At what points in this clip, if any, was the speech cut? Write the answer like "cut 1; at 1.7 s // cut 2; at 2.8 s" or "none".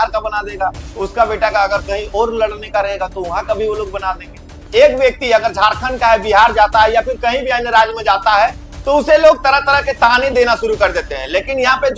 cut 1; at 4.5 s